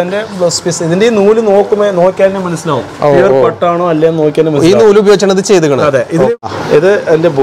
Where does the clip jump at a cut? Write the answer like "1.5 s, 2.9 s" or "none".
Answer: 6.4 s

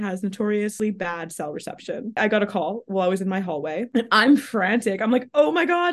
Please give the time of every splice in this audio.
0.7 s, 2.2 s

